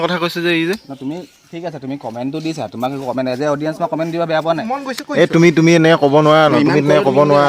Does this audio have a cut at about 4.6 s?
yes; 1 cut; at 4.6 s

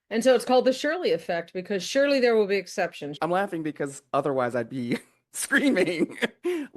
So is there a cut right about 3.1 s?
yes; 1 cut; at 3.1 s

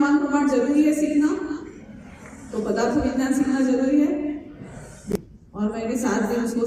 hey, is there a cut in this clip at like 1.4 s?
no; 1 cut; at 5.1 s

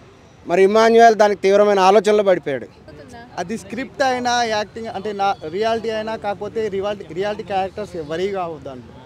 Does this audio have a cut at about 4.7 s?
no; 1 cut; at 2.8 s

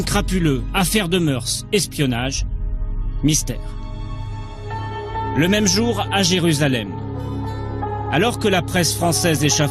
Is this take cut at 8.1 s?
no; 1 cut; at 1.4 s

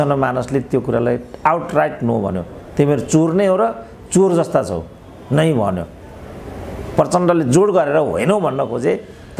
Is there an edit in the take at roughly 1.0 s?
no; 0 cuts

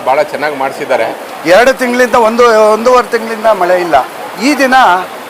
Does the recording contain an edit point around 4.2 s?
yes; 2 cuts; at 1.2 s, 4.2 s

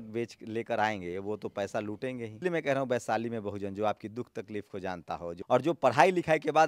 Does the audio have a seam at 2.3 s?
yes; 2 cuts; at 2.3 s, 5.4 s

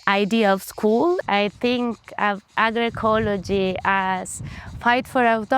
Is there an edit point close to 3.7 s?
no; 2 cuts; at 1.2 s, 2.5 s

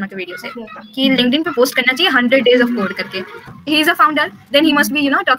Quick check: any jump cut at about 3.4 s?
yes; 1 cut; at 3.4 s

